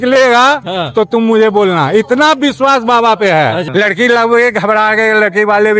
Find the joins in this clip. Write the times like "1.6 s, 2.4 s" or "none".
3.6 s